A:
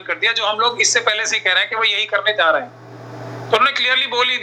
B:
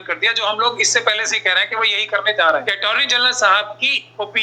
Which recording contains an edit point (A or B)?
B